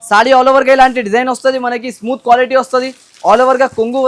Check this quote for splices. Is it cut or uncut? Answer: uncut